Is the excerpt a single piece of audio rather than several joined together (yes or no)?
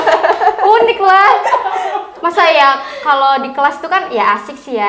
yes